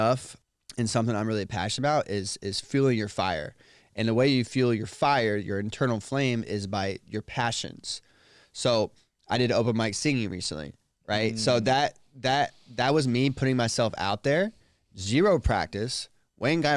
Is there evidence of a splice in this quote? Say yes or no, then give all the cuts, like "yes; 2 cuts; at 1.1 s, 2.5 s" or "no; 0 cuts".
no; 0 cuts